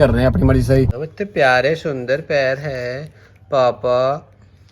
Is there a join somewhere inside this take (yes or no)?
yes